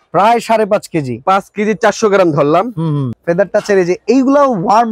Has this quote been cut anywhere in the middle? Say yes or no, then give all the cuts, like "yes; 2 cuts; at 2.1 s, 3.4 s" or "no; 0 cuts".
yes; 1 cut; at 3.1 s